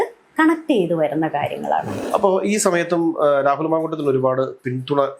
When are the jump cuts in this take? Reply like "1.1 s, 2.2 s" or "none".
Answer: 2.0 s